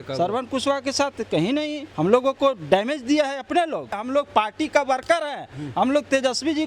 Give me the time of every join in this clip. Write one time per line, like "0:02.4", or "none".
0:01.8
0:03.9